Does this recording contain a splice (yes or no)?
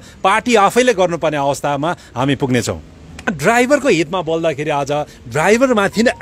yes